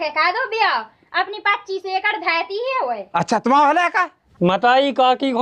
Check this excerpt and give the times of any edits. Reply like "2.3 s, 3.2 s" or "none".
4.2 s